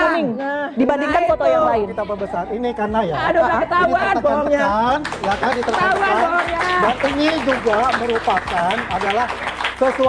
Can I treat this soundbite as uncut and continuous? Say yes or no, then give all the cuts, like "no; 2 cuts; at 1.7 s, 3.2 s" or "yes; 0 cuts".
yes; 0 cuts